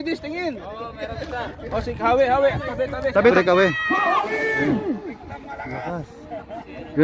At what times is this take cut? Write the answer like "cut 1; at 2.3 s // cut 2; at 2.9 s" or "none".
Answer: cut 1; at 3.3 s